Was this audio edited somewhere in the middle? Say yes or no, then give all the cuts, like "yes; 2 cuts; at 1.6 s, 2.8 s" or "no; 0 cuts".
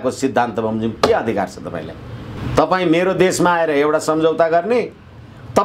yes; 1 cut; at 2.4 s